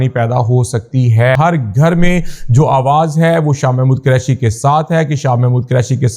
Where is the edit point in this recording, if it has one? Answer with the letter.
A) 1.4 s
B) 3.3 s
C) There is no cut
A